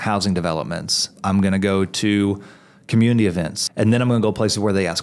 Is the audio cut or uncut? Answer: cut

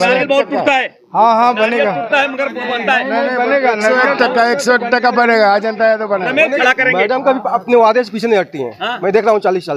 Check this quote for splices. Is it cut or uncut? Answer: cut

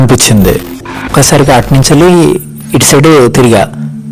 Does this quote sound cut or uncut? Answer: cut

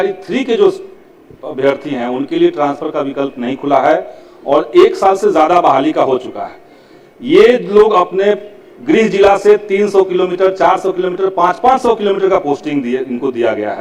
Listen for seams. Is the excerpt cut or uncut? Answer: uncut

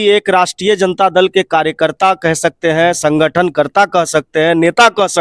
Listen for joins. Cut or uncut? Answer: uncut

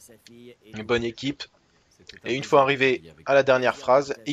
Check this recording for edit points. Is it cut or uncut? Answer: uncut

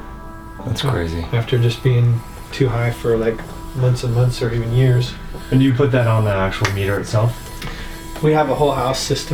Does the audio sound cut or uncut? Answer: uncut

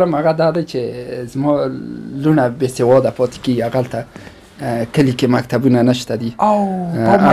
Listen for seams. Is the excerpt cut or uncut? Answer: uncut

